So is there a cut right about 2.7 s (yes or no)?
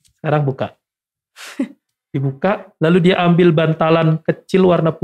no